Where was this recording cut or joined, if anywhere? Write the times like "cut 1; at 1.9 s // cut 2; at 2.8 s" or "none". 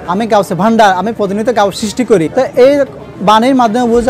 cut 1; at 2.3 s